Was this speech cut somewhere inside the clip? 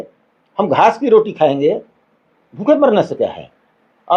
no; 0 cuts

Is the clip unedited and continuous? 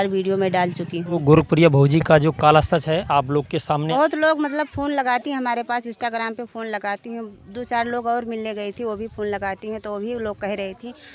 no; 2 cuts; at 1.2 s, 3.9 s

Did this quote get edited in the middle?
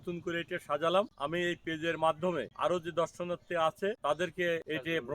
yes; 3 cuts; at 1.2 s, 2.5 s, 4.3 s

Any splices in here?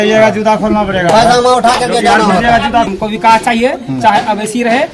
yes; 1 cut; at 2.9 s

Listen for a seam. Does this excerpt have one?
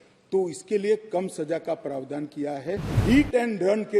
yes; 1 cut; at 3.0 s

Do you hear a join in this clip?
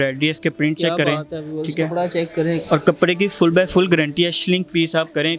no; 0 cuts

